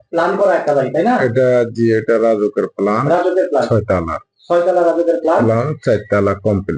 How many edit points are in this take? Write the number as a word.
zero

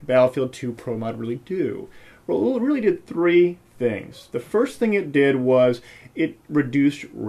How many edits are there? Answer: zero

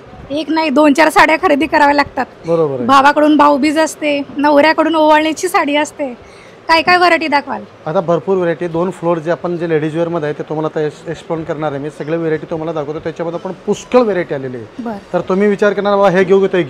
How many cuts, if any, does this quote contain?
zero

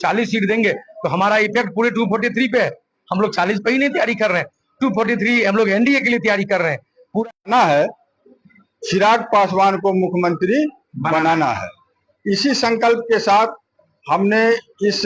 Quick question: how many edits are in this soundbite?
one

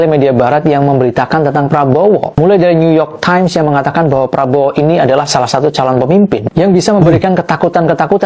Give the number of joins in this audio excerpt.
zero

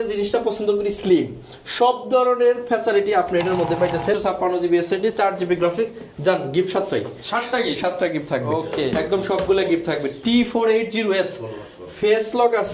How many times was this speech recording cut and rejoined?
one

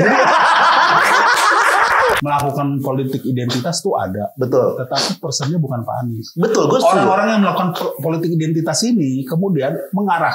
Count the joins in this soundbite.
one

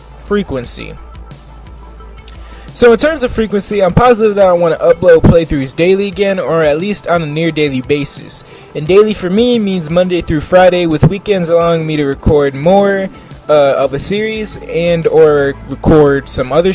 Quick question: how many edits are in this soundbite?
zero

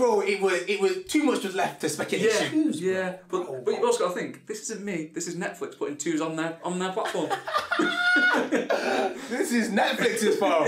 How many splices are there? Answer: one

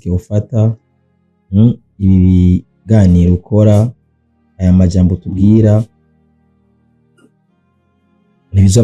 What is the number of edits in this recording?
zero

